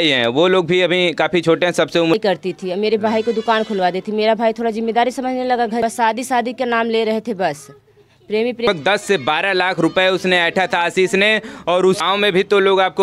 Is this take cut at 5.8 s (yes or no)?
yes